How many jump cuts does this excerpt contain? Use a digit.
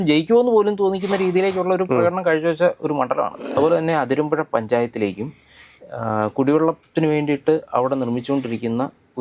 1